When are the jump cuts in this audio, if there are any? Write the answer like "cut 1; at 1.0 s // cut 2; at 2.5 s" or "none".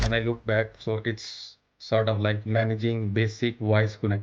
none